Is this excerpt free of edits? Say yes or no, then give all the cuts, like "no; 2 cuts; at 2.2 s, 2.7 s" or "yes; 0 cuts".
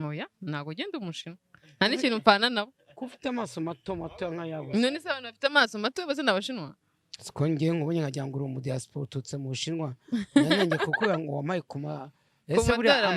yes; 0 cuts